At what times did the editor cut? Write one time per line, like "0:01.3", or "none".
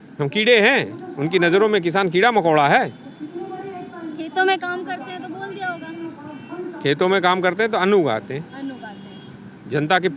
none